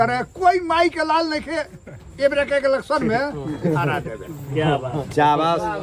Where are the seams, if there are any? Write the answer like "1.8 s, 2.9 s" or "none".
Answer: none